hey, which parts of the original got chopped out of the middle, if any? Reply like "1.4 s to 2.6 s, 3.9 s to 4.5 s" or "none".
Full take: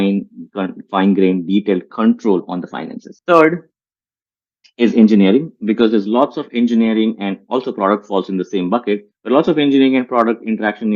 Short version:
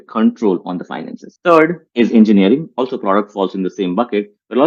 3.7 s to 4.7 s, 5.5 s to 7.4 s